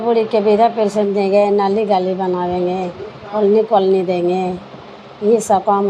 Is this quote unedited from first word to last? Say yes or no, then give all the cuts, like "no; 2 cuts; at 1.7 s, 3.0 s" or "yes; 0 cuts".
yes; 0 cuts